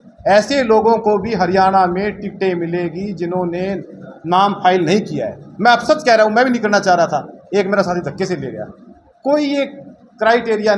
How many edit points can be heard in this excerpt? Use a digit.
0